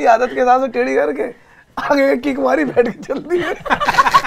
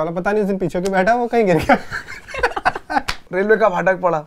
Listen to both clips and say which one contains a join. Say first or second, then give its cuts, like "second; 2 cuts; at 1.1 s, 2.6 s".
second; 1 cut; at 3.2 s